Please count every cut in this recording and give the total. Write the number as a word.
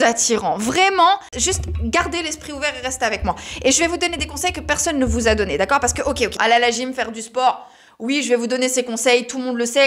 zero